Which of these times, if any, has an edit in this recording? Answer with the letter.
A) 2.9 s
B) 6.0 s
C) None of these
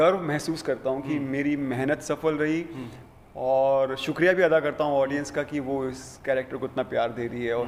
C